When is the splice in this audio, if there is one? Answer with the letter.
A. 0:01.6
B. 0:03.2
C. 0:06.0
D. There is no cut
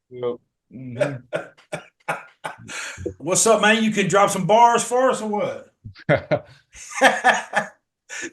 B